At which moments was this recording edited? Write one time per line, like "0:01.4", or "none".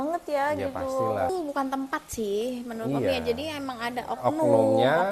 0:01.3